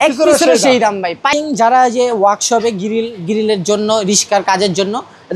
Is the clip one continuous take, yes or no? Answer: no